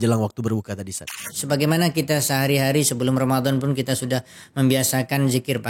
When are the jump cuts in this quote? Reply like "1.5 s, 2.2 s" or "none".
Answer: 1.2 s